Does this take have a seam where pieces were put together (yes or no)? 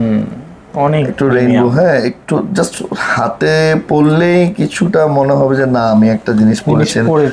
no